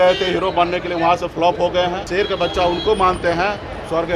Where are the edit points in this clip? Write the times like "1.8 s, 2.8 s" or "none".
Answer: 2.0 s